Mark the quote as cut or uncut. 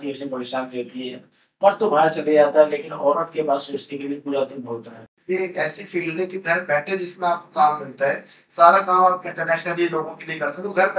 cut